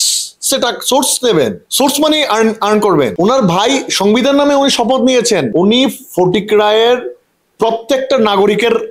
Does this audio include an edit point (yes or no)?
yes